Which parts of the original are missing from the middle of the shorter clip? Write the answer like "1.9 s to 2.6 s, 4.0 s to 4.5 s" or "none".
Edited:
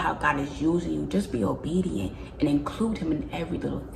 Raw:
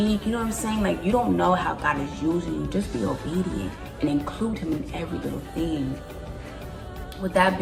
none